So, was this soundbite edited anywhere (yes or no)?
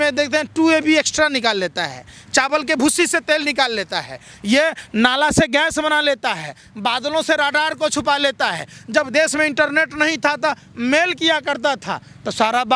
no